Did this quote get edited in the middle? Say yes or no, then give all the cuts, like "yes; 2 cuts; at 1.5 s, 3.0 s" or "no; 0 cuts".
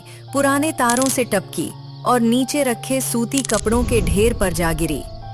no; 0 cuts